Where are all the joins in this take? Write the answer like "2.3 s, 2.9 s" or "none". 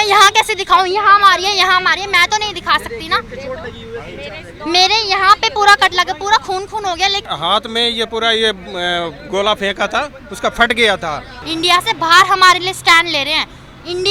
none

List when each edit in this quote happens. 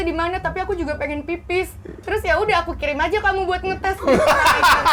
none

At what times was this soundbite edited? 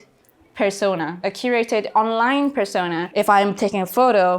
1.1 s, 3.0 s

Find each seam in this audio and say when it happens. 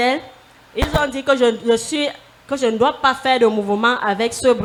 none

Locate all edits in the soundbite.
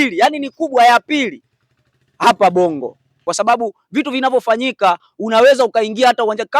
3.1 s

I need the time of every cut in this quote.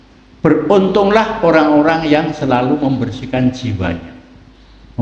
none

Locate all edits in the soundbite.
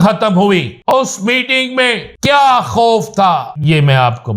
0.9 s, 2.1 s, 3.5 s

